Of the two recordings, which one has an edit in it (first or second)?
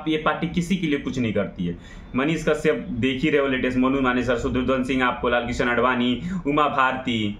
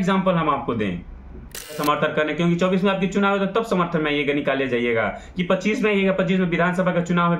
second